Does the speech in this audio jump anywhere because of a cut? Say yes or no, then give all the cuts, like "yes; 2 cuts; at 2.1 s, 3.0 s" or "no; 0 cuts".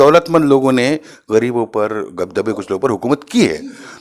no; 0 cuts